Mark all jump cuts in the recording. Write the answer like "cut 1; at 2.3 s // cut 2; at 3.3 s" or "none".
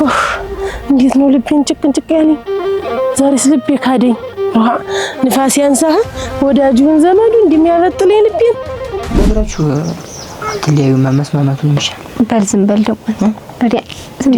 cut 1; at 9.2 s